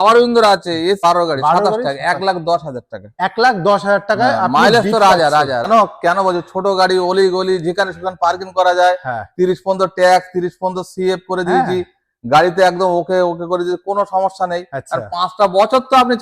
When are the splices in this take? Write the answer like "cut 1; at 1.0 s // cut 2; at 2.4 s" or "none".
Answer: cut 1; at 1.0 s // cut 2; at 5.7 s